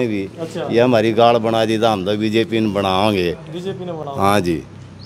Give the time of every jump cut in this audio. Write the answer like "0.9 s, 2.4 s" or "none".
none